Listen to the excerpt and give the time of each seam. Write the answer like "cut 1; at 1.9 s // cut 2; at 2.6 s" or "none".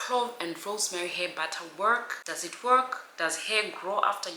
cut 1; at 2.2 s